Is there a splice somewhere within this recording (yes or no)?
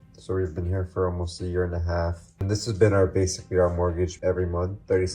yes